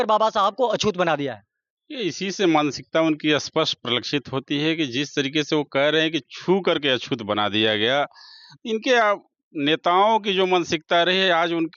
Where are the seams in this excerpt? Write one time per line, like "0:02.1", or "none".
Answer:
none